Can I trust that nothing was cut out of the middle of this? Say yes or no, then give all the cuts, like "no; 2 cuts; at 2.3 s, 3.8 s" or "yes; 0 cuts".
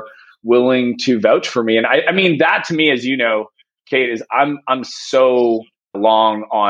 yes; 0 cuts